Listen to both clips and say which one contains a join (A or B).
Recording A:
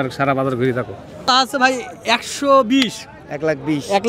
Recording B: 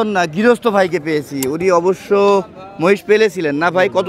A